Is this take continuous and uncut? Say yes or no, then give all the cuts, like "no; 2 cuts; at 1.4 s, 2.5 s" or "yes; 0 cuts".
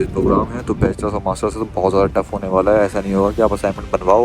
yes; 0 cuts